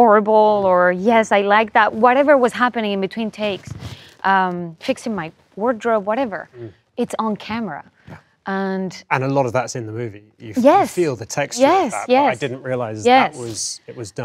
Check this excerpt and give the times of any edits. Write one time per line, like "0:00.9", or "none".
none